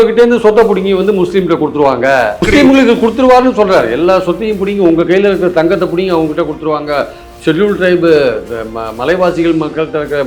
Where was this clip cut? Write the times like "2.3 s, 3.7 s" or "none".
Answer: 2.4 s

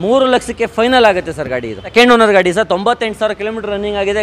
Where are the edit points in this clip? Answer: 1.9 s

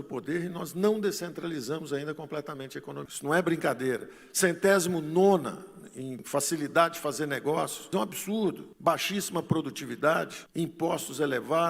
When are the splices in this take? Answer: 3.1 s

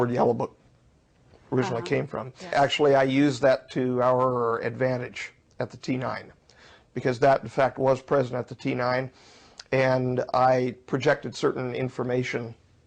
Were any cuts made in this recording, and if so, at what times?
2.5 s

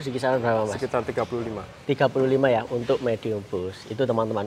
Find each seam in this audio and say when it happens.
none

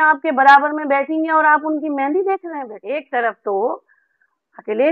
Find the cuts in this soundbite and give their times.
2.7 s

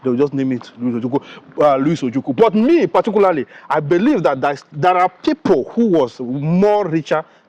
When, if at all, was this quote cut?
none

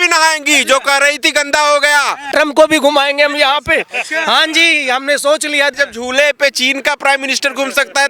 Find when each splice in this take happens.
2.3 s, 5.8 s

